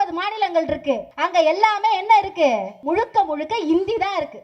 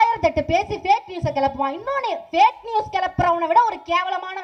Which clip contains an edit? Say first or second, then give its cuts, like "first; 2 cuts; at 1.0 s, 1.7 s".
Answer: first; 2 cuts; at 1.1 s, 2.7 s